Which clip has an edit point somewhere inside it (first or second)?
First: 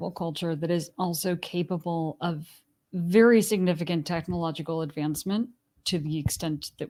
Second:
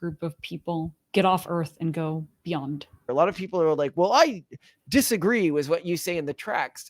second